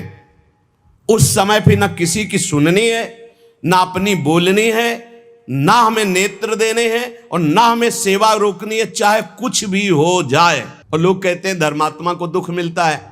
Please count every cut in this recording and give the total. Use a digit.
1